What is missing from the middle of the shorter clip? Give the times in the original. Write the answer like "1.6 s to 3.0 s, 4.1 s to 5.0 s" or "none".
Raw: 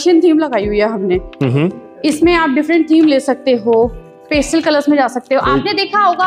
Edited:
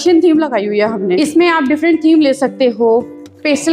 1.2 s to 2.0 s